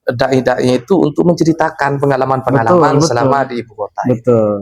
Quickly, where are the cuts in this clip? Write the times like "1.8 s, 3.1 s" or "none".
none